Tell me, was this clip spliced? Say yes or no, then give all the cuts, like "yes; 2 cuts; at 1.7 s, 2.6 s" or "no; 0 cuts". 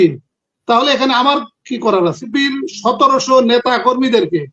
yes; 1 cut; at 2.3 s